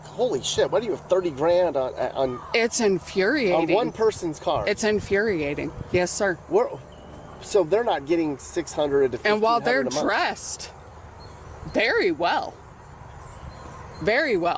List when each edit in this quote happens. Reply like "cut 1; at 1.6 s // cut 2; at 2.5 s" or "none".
none